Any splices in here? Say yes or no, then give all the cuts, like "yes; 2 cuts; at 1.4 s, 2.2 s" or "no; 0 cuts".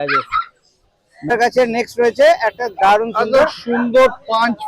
yes; 1 cut; at 1.2 s